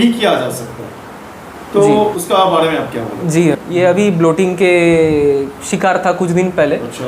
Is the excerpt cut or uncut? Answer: cut